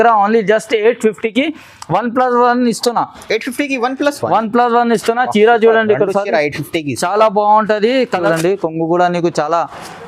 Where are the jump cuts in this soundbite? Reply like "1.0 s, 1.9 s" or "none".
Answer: 8.3 s